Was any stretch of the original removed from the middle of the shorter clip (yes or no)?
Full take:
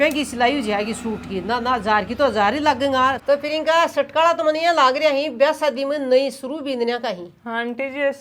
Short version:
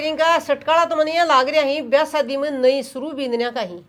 no